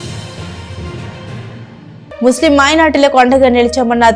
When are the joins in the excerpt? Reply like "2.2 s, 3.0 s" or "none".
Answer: none